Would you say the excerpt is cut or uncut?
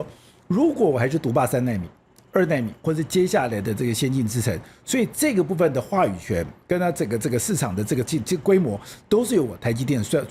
uncut